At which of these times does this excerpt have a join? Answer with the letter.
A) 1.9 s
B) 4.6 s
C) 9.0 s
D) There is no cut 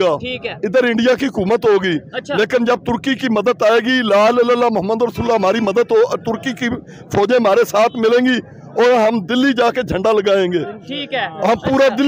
D